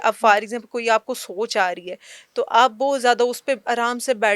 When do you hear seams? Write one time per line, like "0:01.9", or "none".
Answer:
none